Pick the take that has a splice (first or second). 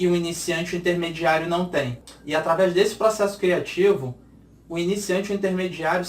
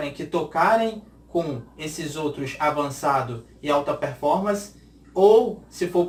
first